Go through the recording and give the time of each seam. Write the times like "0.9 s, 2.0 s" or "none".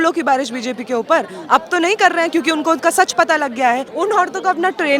3.9 s